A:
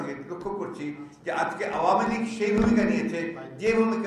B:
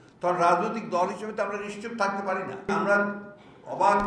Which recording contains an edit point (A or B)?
B